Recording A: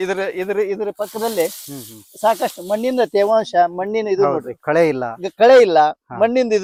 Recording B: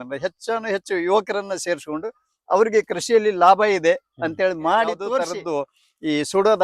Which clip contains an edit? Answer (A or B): B